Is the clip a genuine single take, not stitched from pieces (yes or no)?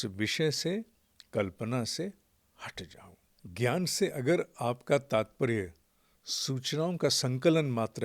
no